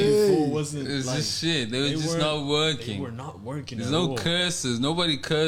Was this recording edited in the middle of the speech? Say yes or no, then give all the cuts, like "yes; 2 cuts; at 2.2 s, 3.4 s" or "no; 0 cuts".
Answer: no; 0 cuts